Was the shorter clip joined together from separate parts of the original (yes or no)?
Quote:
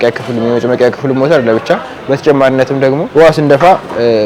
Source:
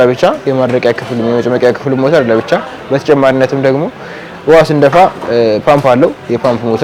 yes